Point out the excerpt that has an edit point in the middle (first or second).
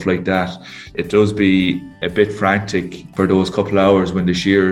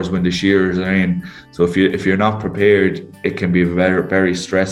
first